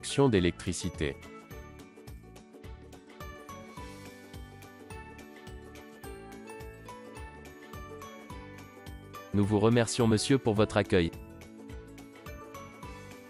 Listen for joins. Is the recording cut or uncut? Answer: cut